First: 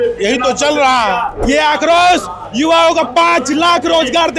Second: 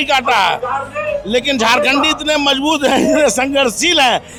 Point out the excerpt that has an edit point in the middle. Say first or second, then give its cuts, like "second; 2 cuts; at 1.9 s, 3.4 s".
first; 1 cut; at 1.3 s